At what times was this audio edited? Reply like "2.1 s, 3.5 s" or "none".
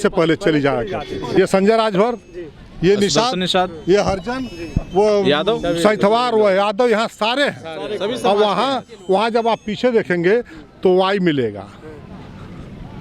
1.3 s